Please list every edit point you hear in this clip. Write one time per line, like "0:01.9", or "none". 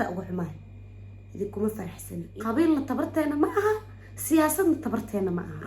0:02.2

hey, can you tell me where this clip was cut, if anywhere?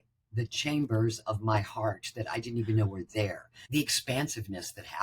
0:03.5

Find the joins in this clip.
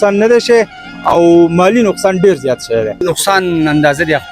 0:03.0

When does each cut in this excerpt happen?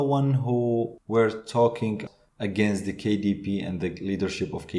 0:01.0
0:02.0

